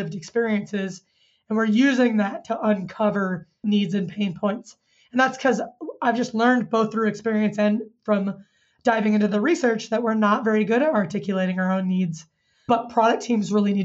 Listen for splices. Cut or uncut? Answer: uncut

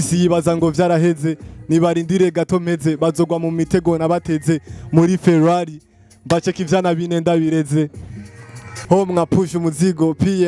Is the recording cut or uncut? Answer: cut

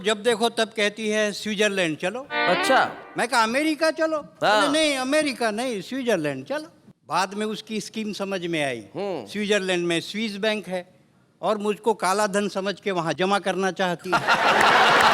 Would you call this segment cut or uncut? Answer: uncut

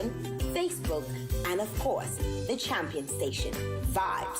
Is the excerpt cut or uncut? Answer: cut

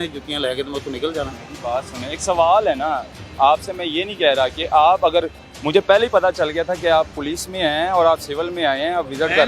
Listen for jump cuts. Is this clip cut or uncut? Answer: uncut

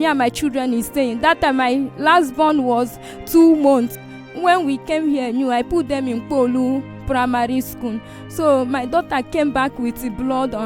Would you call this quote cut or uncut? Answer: cut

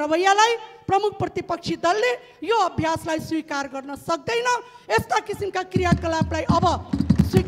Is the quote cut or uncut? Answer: uncut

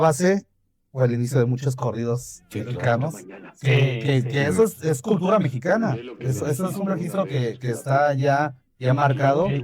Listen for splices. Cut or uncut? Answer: uncut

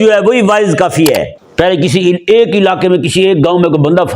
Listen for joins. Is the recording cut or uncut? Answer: cut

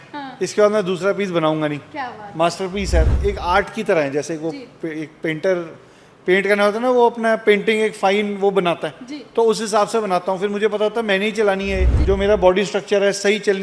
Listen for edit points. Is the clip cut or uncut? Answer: cut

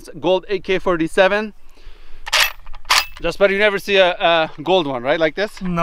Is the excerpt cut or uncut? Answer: cut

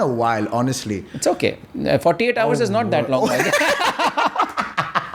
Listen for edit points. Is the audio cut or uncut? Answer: uncut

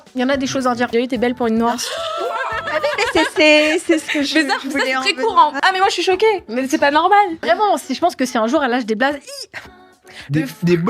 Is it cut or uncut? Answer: cut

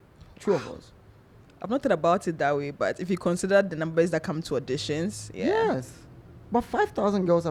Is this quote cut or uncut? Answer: uncut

